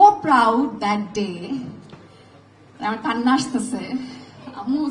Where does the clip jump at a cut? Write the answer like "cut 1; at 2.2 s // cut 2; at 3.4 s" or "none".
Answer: none